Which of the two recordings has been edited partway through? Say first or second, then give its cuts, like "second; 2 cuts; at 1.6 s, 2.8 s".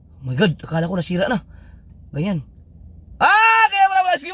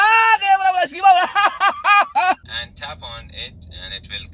second; 1 cut; at 2.4 s